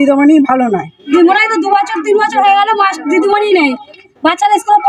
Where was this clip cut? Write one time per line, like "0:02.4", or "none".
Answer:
0:01.0